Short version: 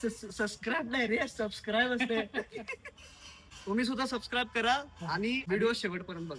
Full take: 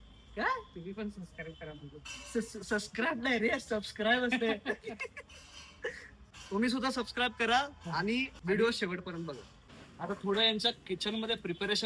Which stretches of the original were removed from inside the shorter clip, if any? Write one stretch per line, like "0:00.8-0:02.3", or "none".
0:05.6-0:06.1
0:08.3-0:08.4